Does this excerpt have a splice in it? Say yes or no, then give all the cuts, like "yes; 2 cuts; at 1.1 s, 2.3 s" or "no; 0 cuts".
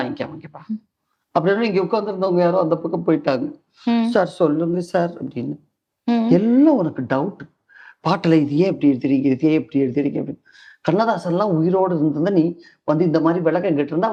no; 0 cuts